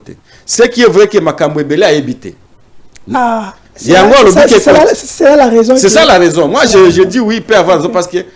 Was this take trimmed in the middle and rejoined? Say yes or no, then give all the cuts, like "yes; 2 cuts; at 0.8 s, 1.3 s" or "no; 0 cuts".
no; 0 cuts